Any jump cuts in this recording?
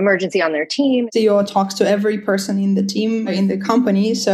yes; 2 cuts; at 1.1 s, 3.3 s

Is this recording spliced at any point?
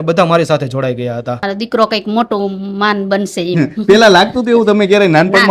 yes; 1 cut; at 1.4 s

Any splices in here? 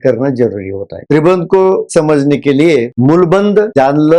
yes; 3 cuts; at 1.0 s, 1.9 s, 2.9 s

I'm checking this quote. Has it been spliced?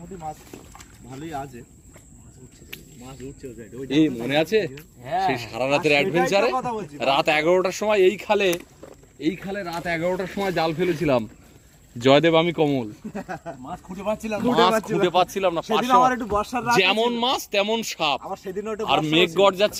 no; 0 cuts

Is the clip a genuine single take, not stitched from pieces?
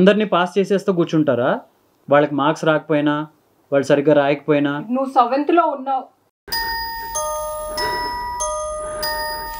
yes; 0 cuts

